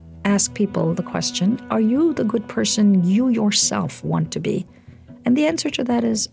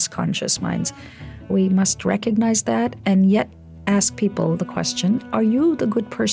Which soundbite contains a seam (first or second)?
second